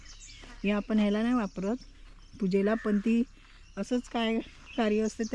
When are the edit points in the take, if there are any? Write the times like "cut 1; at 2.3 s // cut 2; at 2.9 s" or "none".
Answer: none